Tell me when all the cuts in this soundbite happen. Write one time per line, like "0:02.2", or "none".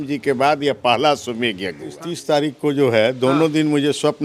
0:01.9